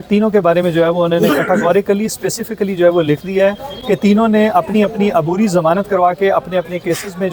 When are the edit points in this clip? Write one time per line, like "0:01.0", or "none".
none